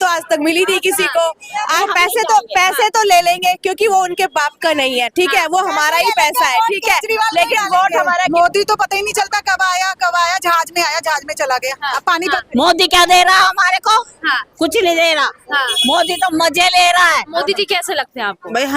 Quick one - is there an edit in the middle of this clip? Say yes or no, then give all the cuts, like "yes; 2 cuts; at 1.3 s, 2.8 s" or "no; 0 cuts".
yes; 4 cuts; at 1.8 s, 8.3 s, 12.2 s, 17.3 s